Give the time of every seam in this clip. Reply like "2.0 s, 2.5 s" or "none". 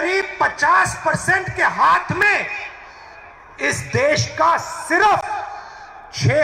none